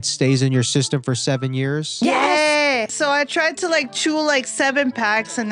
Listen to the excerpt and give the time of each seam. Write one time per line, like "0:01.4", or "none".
0:02.9